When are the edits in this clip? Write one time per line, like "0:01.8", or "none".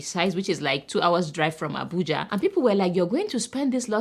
0:02.2